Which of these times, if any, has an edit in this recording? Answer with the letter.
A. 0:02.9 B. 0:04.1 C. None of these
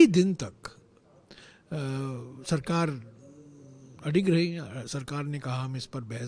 C